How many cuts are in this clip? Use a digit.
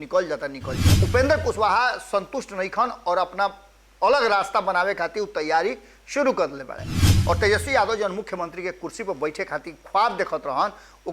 2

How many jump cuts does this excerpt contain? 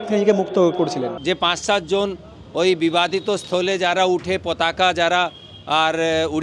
1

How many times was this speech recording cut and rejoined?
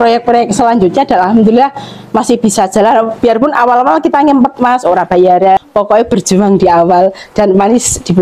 1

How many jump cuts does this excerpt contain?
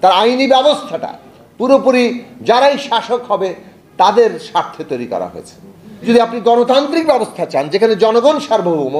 1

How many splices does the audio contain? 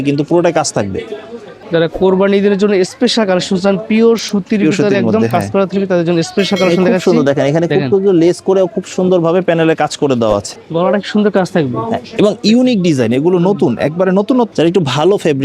3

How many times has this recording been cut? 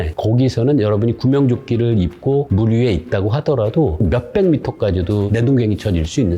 2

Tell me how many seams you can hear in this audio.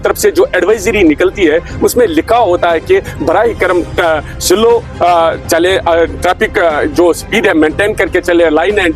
0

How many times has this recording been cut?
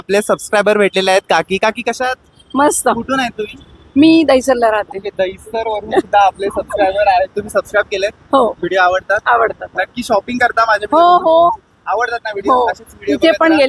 0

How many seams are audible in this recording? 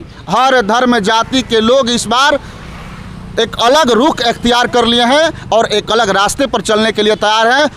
0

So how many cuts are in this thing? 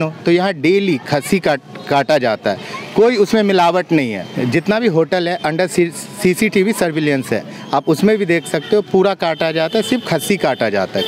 1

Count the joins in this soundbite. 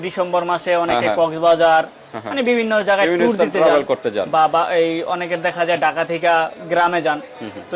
0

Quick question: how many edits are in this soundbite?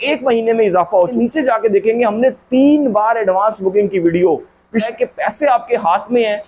2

